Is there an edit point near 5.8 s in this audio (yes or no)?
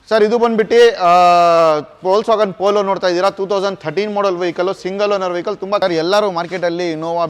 yes